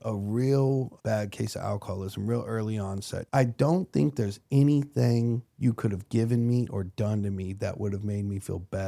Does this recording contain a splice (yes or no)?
yes